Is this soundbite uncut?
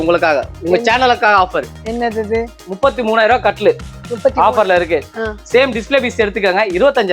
yes; 0 cuts

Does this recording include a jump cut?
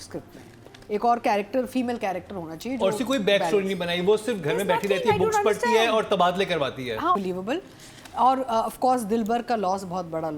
yes; 1 cut; at 7.2 s

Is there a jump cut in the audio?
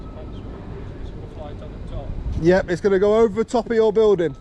no; 0 cuts

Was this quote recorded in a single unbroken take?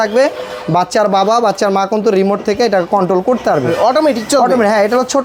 yes; 0 cuts

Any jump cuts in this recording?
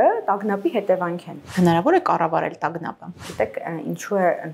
yes; 2 cuts; at 1.5 s, 3.3 s

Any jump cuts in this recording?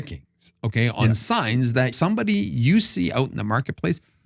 yes; 1 cut; at 1.9 s

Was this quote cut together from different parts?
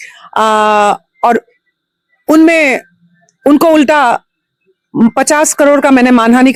no; 0 cuts

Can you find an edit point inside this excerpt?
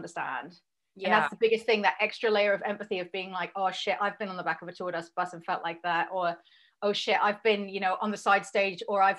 no; 0 cuts

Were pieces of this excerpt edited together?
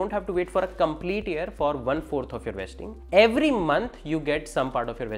no; 0 cuts

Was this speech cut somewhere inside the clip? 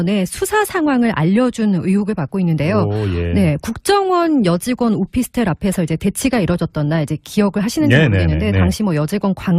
yes; 1 cut; at 2.3 s

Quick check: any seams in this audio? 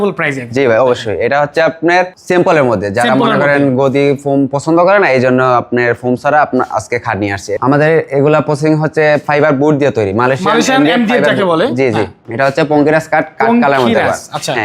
yes; 3 cuts; at 2.2 s, 7.5 s, 12.2 s

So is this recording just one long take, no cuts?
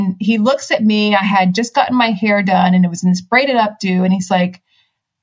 yes; 0 cuts

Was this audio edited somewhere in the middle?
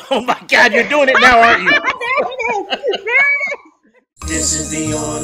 yes; 1 cut; at 4.2 s

